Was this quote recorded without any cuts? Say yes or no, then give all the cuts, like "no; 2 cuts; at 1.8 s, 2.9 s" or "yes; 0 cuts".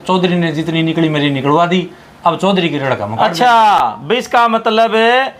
yes; 0 cuts